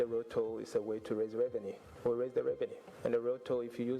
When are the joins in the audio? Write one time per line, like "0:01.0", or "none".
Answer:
0:01.8
0:02.8